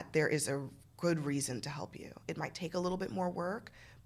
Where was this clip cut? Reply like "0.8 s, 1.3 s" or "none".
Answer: 2.3 s

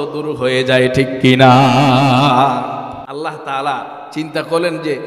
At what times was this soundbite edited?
3.0 s

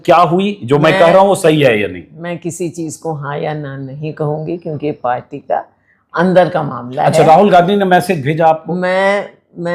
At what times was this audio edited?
none

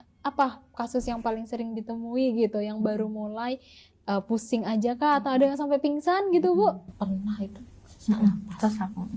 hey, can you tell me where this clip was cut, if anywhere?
6.9 s

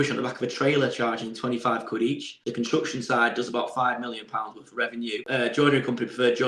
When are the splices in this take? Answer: 2.4 s, 5.2 s

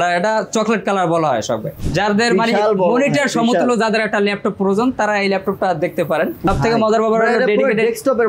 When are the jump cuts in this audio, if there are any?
1.7 s, 6.4 s

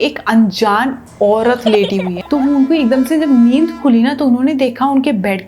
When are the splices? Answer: 2.2 s

